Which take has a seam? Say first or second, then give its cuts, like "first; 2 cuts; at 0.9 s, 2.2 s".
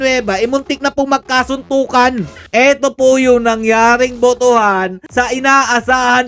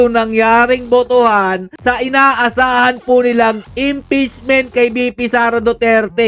first; 1 cut; at 2.4 s